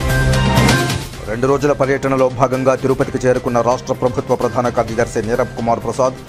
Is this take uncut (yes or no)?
yes